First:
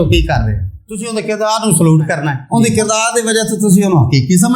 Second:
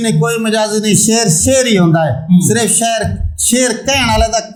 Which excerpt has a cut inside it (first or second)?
first